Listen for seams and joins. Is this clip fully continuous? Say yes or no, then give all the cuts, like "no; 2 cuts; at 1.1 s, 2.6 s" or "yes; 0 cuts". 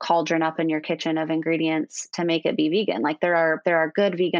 yes; 0 cuts